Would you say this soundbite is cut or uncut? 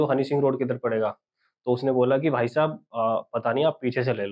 uncut